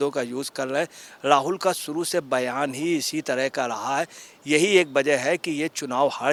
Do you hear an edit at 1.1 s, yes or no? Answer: no